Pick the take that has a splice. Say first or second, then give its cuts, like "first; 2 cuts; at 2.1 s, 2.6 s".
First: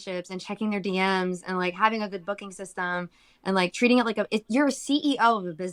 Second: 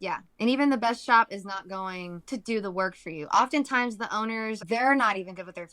second; 2 cuts; at 2.1 s, 4.6 s